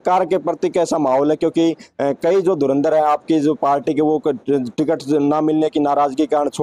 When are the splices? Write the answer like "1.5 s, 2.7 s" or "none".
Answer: none